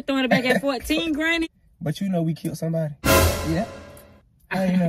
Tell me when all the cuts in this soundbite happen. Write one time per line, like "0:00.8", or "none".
0:01.5